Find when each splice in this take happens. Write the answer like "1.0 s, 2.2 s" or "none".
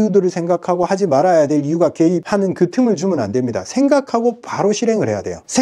none